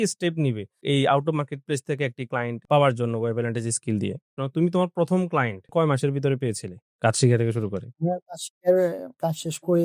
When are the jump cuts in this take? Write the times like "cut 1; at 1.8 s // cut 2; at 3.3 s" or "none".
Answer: cut 1; at 4.3 s // cut 2; at 5.7 s